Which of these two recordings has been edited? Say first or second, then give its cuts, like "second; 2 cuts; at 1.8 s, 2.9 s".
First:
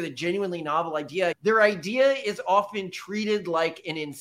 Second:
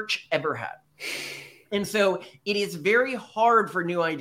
first; 1 cut; at 1.4 s